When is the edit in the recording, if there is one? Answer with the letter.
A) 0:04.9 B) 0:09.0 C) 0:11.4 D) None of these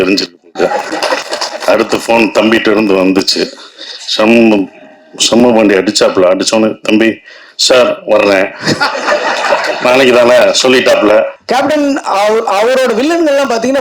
C